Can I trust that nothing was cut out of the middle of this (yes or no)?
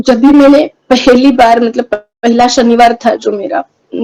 yes